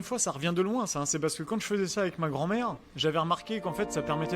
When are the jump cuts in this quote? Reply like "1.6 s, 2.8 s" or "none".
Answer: 2.8 s